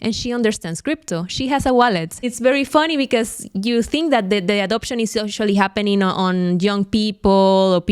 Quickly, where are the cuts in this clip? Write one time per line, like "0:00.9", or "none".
0:02.3